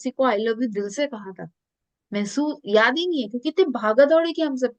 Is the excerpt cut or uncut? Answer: uncut